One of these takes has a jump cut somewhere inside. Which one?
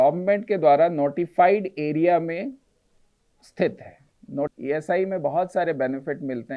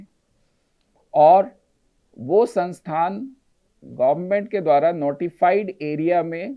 first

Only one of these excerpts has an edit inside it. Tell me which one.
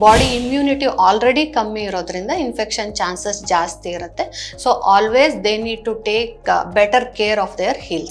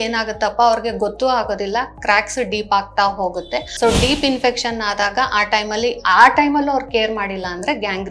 second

